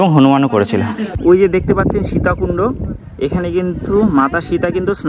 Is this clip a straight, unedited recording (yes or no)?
no